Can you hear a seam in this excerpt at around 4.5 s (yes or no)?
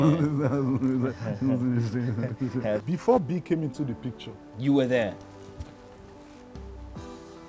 no